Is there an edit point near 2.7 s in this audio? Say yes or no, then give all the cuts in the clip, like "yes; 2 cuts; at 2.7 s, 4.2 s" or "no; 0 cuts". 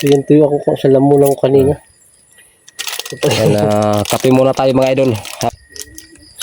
no; 1 cut; at 5.5 s